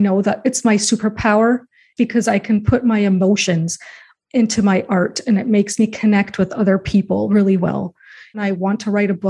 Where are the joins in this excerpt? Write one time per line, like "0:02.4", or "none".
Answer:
0:01.9
0:03.4
0:08.4